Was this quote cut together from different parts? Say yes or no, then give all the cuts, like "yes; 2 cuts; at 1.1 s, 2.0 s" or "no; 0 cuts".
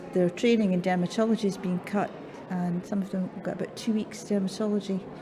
no; 0 cuts